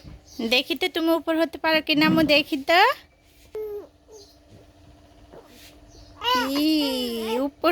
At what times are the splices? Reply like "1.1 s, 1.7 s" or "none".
3.6 s